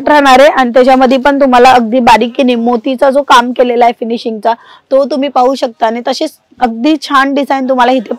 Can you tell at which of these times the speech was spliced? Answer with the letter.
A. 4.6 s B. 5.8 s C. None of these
C